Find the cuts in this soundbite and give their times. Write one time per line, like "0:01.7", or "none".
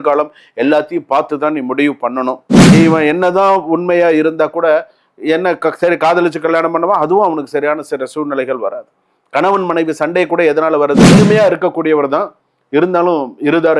0:02.5
0:11.1